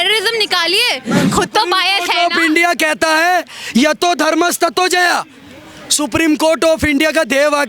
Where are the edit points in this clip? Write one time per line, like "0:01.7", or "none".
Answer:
0:01.3